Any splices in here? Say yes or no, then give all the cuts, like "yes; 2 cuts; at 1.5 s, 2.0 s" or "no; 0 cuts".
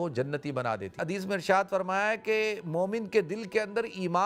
yes; 1 cut; at 0.9 s